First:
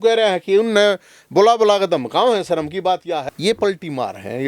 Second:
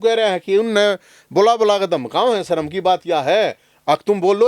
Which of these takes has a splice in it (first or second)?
first